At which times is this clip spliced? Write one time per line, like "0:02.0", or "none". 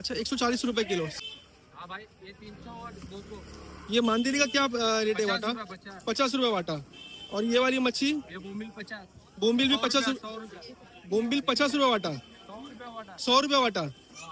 0:01.1

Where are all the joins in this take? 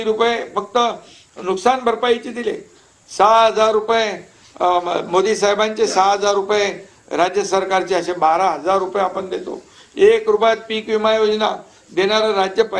none

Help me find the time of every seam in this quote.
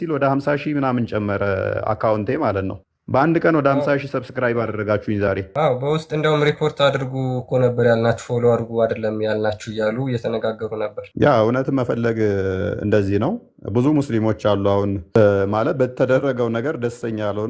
none

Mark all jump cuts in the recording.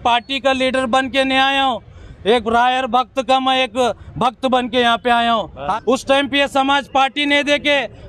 0:05.7

